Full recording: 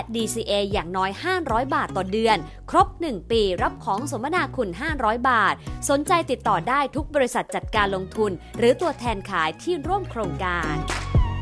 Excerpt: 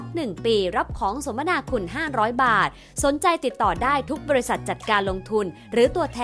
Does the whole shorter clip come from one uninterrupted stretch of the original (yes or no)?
yes